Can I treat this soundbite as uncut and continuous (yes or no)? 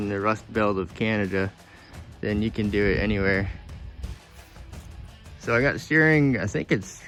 yes